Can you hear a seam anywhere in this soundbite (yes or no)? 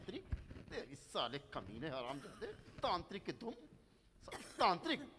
no